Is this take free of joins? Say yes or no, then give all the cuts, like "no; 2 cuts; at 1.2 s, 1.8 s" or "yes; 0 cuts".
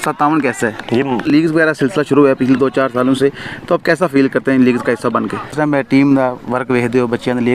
no; 2 cuts; at 1.3 s, 5.5 s